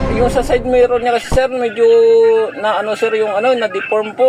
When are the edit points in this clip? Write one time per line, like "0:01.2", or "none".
none